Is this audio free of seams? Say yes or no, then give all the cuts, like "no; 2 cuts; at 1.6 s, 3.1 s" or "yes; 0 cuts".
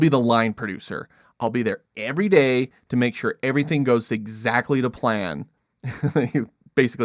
yes; 0 cuts